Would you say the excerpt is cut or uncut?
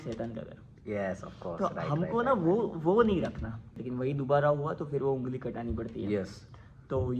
cut